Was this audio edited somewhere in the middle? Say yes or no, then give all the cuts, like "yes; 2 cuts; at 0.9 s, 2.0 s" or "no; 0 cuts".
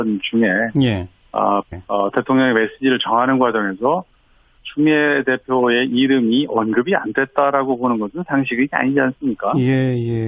no; 0 cuts